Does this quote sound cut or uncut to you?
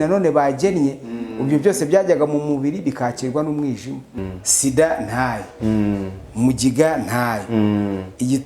cut